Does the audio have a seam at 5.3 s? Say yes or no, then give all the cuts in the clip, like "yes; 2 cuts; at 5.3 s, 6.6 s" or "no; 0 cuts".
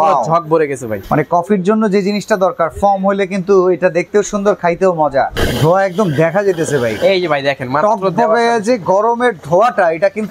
yes; 2 cuts; at 1.0 s, 5.3 s